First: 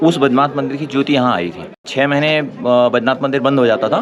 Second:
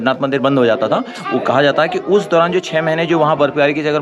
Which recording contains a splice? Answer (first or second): first